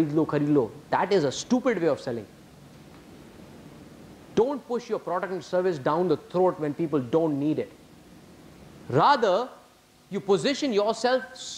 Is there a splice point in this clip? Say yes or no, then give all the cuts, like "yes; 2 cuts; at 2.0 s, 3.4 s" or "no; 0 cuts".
no; 0 cuts